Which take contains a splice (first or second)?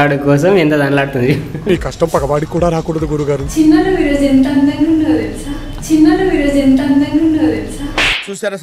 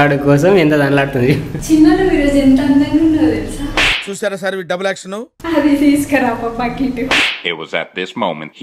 second